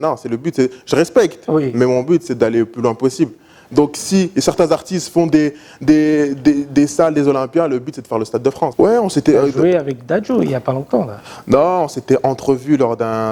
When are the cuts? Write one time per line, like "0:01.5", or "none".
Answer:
0:08.7